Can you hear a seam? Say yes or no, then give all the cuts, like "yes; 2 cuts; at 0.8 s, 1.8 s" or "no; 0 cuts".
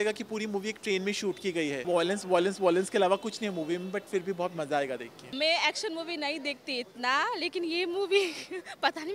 yes; 2 cuts; at 1.8 s, 5.4 s